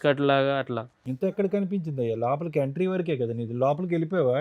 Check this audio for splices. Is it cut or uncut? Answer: uncut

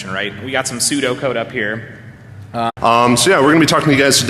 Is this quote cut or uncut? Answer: uncut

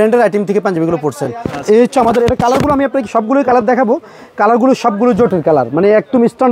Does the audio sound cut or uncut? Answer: uncut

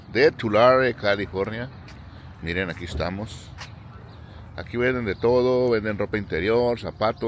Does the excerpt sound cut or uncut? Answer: uncut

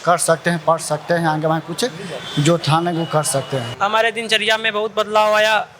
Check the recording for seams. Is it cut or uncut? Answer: cut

